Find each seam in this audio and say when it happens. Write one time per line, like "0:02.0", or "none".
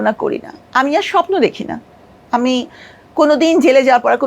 none